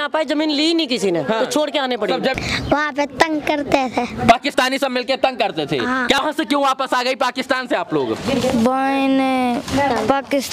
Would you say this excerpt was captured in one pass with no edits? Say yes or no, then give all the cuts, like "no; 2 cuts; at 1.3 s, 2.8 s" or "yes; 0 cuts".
no; 2 cuts; at 2.3 s, 6.2 s